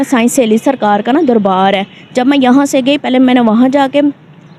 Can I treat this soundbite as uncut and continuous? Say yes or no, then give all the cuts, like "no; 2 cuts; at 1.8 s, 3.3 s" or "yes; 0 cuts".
yes; 0 cuts